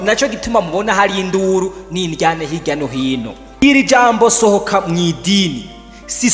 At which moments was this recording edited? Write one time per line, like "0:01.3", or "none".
0:03.6